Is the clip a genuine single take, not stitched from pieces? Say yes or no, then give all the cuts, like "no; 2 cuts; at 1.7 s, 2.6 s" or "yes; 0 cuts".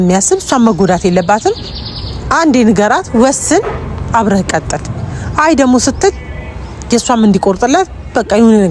yes; 0 cuts